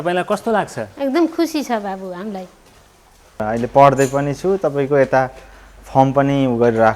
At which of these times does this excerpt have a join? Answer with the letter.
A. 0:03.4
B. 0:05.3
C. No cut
A